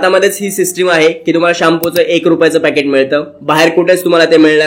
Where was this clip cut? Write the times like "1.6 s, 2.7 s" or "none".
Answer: none